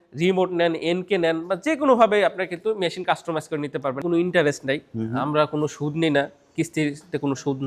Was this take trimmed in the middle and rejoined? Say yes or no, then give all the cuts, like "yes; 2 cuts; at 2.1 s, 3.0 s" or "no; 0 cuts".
yes; 1 cut; at 4.0 s